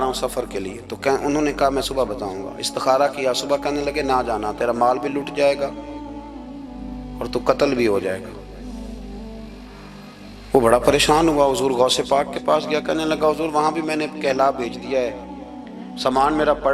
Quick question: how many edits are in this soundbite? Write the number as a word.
zero